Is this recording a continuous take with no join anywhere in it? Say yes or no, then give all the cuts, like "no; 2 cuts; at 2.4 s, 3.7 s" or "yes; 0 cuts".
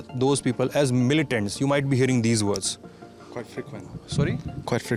yes; 0 cuts